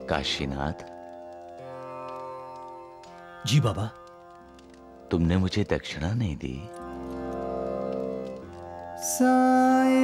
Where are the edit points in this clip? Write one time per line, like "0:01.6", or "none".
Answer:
0:06.8
0:08.3